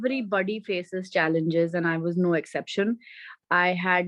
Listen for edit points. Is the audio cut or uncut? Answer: uncut